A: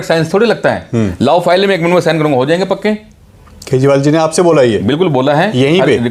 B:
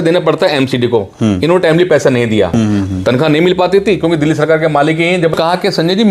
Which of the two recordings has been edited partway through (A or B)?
B